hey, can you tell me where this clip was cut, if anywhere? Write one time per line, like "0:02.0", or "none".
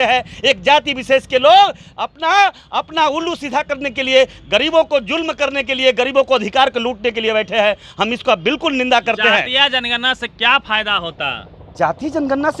none

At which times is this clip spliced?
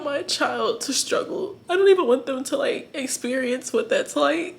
0:01.6

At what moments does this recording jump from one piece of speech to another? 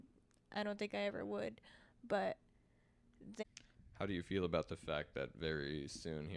0:03.4

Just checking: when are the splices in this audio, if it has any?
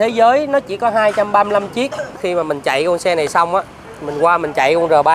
0:02.2

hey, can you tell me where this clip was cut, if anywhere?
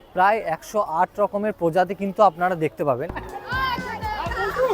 0:03.4

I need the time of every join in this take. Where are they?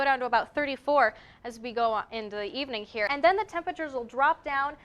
0:03.1

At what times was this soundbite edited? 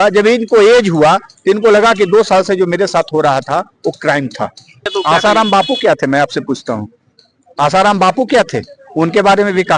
0:04.9

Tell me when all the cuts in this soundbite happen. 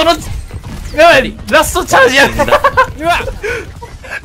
none

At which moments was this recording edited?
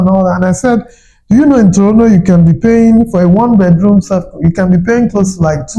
none

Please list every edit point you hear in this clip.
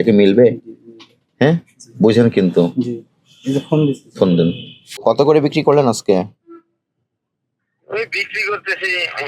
0:05.0

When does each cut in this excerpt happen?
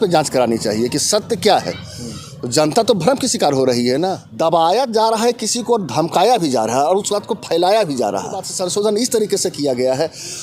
0:04.2
0:08.5

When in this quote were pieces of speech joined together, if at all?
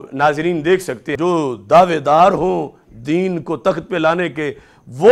0:01.1

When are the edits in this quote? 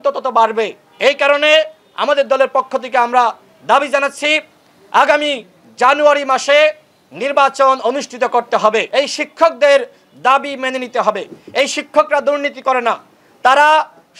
0:08.8

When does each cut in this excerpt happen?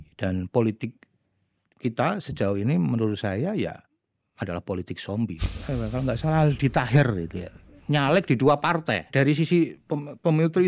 0:05.4
0:09.1

